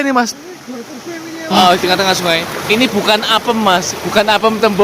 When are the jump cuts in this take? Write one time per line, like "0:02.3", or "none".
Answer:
0:01.6